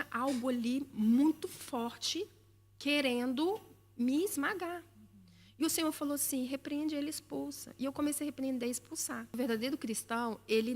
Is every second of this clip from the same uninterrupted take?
no; 1 cut; at 9.3 s

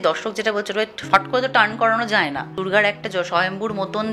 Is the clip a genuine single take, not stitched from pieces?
no; 1 cut; at 2.6 s

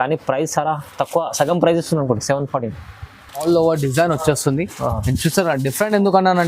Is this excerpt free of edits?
no; 1 cut; at 3.4 s

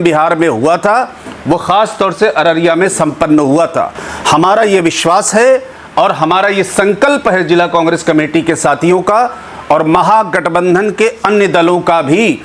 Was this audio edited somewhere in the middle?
no; 0 cuts

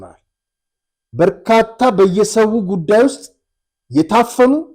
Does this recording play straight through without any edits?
yes; 0 cuts

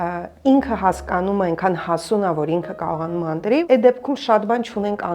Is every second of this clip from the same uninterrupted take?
no; 1 cut; at 3.6 s

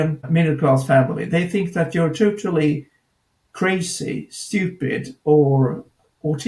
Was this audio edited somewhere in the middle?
no; 0 cuts

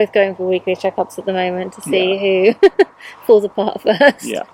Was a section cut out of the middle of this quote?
no; 0 cuts

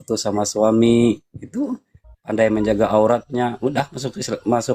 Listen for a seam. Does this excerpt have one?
no; 0 cuts

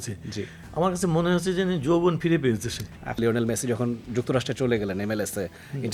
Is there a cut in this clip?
yes; 1 cut; at 3.2 s

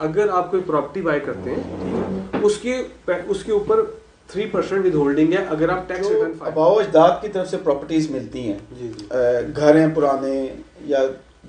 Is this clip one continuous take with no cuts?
no; 1 cut; at 6.0 s

